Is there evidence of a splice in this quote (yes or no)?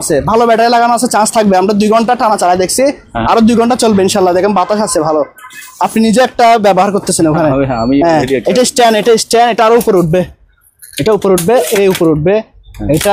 no